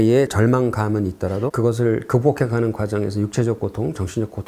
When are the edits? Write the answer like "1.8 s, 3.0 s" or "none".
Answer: 1.5 s